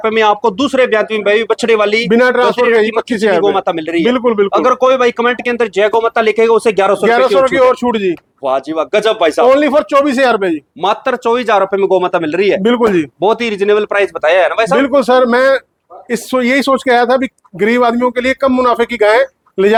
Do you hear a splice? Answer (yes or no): no